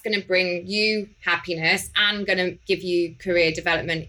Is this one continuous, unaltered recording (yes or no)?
no